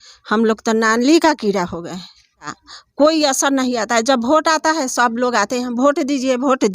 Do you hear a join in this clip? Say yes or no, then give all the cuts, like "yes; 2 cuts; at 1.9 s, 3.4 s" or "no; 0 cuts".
yes; 1 cut; at 2.6 s